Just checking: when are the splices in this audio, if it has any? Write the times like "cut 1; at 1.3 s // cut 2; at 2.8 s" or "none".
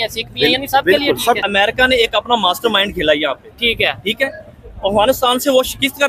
cut 1; at 1.4 s